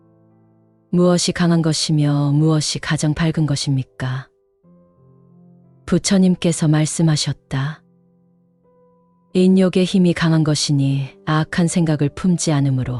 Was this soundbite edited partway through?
no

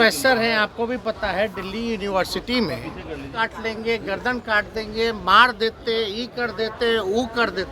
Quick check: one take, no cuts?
no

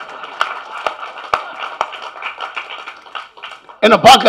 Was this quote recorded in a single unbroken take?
yes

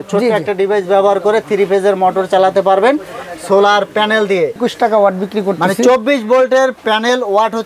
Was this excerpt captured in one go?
no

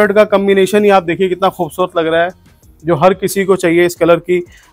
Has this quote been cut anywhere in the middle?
no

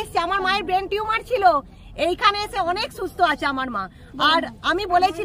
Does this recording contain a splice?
no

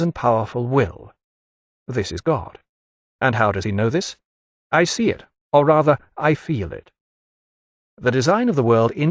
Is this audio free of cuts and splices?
no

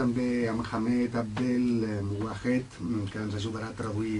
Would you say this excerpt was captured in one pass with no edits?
yes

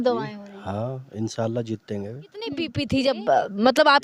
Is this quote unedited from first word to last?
no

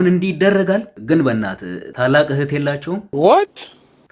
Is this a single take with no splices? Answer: no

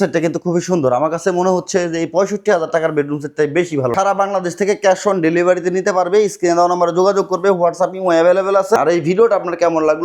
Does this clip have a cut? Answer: yes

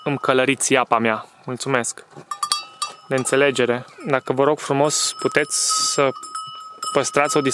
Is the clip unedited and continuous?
no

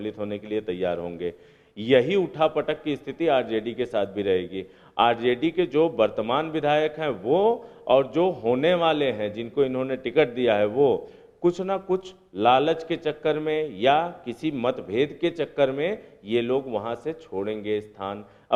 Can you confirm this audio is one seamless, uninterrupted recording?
yes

